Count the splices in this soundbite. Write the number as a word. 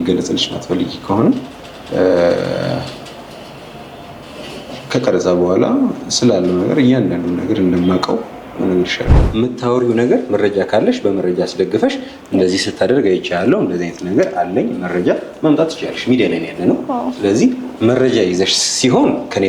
one